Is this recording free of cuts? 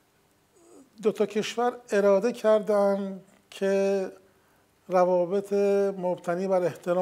yes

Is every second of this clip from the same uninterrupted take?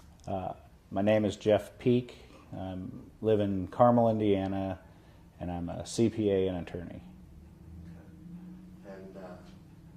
no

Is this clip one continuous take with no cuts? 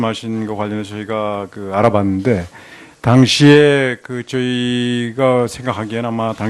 no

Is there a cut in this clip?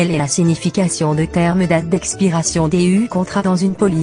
no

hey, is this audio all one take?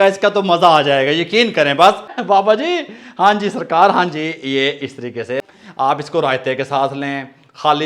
no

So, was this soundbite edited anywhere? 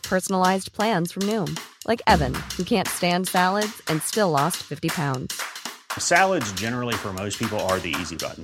no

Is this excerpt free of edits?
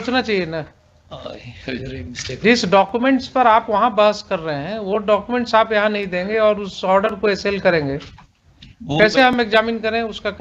yes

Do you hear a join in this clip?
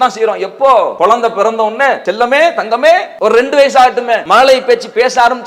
yes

